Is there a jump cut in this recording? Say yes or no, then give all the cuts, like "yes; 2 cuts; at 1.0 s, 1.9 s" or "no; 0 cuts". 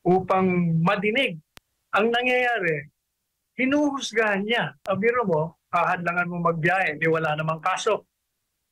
no; 0 cuts